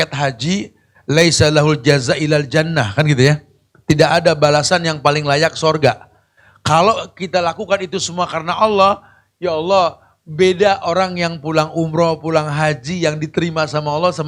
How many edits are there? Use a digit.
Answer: 0